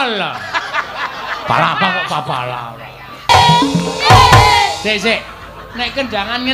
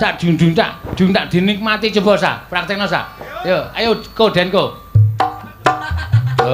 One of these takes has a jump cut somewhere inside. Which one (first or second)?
first